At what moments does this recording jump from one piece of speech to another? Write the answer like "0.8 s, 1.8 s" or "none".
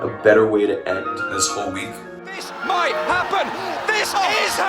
2.4 s